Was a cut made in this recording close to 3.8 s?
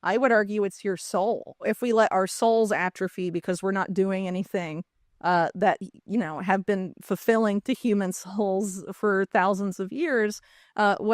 no; 1 cut; at 1.6 s

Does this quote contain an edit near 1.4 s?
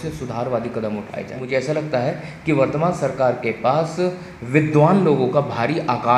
yes; 1 cut; at 1.4 s

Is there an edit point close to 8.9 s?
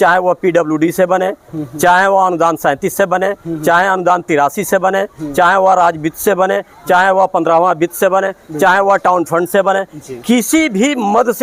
no; 0 cuts

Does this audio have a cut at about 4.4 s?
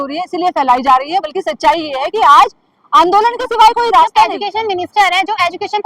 yes; 1 cut; at 4.4 s

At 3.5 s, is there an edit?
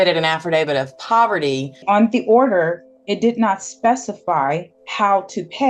no; 2 cuts; at 1.8 s, 4.8 s

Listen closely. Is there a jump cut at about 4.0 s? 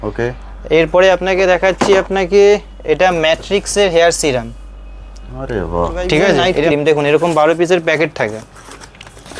no; 1 cut; at 6.6 s

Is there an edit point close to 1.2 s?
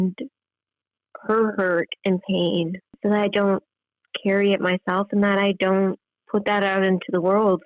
no; 2 cuts; at 2.9 s, 6.1 s

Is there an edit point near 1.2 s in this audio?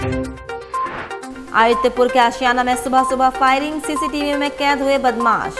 yes; 1 cut; at 1.2 s

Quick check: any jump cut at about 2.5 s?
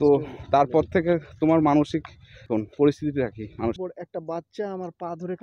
yes; 2 cuts; at 2.5 s, 3.8 s

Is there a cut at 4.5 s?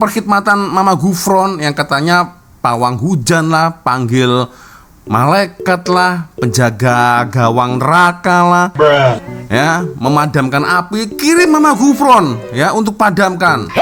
no; 0 cuts

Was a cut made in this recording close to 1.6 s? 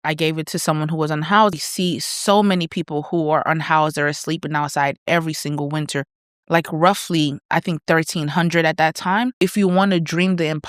yes; 2 cuts; at 1.6 s, 9.4 s

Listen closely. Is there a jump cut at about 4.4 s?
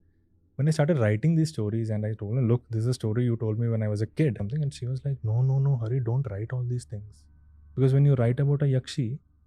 yes; 1 cut; at 4.4 s

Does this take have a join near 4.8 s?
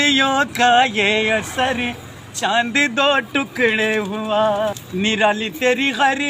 yes; 1 cut; at 4.8 s

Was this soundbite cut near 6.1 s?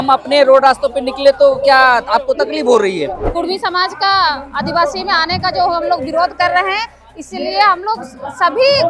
no; 1 cut; at 3.2 s

